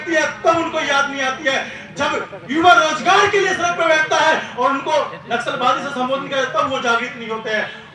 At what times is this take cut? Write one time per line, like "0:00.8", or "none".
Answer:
none